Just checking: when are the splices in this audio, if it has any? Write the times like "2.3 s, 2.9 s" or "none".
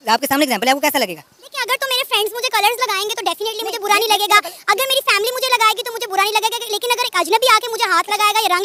none